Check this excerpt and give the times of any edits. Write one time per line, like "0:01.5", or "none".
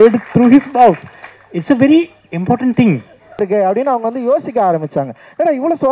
0:03.4